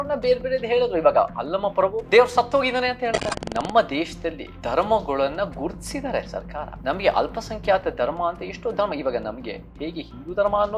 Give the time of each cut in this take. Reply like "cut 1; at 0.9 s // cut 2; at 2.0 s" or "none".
cut 1; at 2.0 s // cut 2; at 3.3 s // cut 3; at 4.5 s // cut 4; at 6.7 s